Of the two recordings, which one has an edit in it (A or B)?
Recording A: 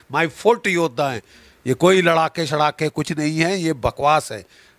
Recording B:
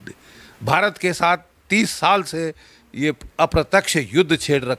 A